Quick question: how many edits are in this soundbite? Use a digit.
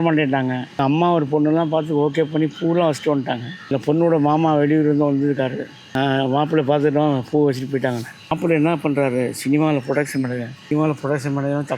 5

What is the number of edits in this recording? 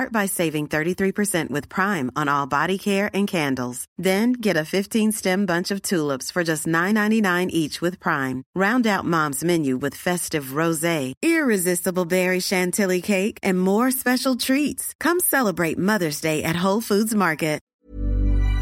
1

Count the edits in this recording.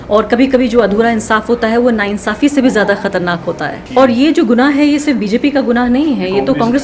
1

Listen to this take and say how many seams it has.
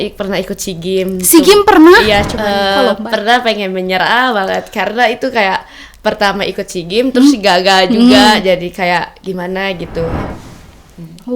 2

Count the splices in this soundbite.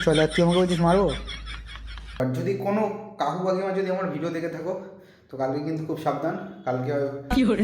1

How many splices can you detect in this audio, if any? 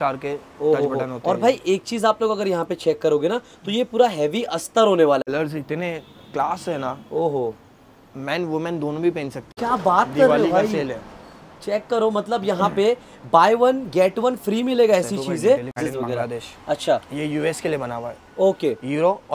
3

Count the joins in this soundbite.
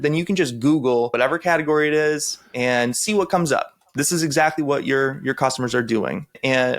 1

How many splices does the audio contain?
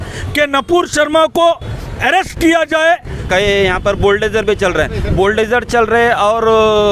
1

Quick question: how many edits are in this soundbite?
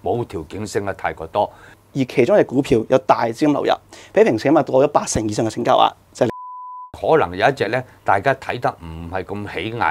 2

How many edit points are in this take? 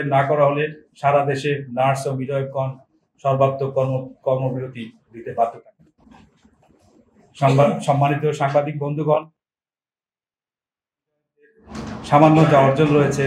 0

